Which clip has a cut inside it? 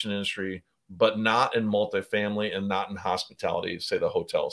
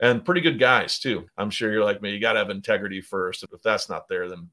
second; 2 cuts; at 1.3 s, 3.4 s

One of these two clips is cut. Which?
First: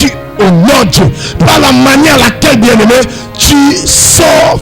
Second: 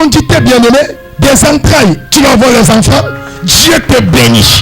second; 2 cuts; at 1.0 s, 2.0 s

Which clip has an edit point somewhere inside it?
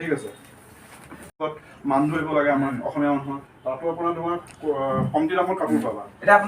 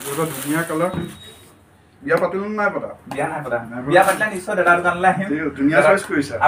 first; 1 cut; at 1.4 s

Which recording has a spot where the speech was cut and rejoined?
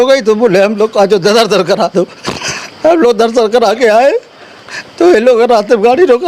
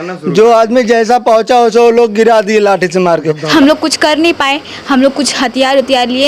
second; 1 cut; at 3.5 s

